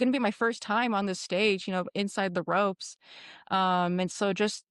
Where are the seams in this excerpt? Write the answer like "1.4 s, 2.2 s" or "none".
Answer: none